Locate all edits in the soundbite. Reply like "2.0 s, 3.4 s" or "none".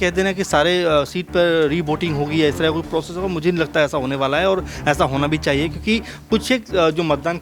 none